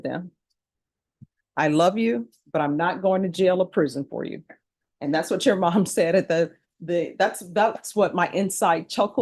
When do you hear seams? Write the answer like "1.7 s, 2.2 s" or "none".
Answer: none